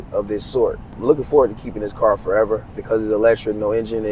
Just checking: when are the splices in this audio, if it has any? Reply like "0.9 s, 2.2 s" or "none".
1.0 s